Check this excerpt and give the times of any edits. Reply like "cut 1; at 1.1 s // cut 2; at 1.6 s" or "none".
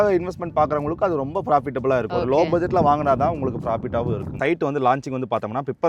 cut 1; at 2.1 s // cut 2; at 4.4 s